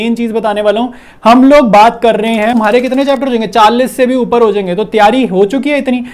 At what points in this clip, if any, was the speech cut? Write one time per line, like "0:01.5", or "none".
0:02.6